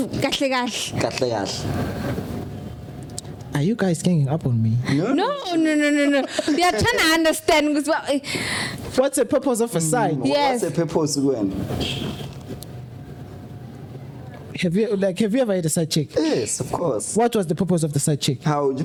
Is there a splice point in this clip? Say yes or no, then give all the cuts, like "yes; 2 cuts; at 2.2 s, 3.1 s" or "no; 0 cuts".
no; 0 cuts